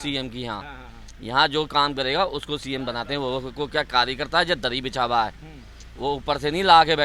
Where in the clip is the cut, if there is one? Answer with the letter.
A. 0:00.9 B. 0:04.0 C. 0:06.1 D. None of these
D